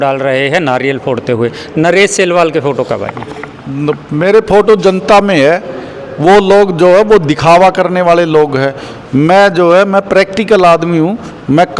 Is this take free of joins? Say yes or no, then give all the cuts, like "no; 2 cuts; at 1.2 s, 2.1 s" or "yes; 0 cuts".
yes; 0 cuts